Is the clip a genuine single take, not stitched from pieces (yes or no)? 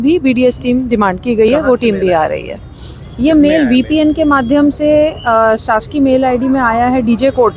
yes